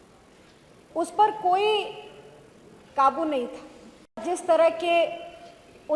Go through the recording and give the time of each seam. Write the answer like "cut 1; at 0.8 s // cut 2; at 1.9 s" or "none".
cut 1; at 4.2 s

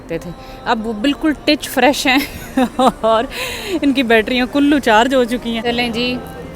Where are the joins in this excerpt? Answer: cut 1; at 5.6 s

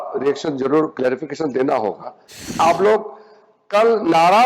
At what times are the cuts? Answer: cut 1; at 2.6 s

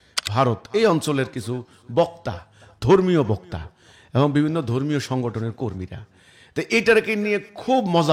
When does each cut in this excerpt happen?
none

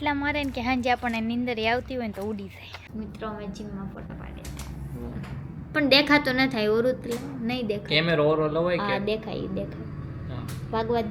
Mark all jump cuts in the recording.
cut 1; at 2.7 s

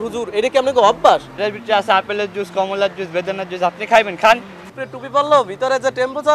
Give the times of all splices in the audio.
cut 1; at 1.4 s // cut 2; at 4.6 s

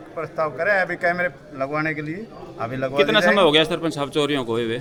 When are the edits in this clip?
none

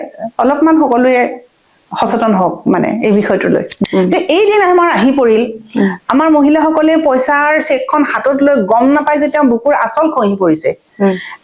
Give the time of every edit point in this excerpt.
cut 1; at 3.7 s

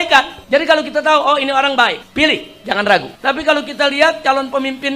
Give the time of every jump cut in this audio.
cut 1; at 2.0 s

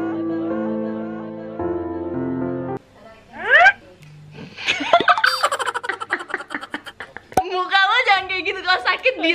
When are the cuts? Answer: cut 1; at 2.8 s // cut 2; at 7.2 s

